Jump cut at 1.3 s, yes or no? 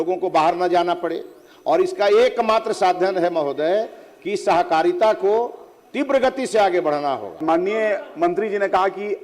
no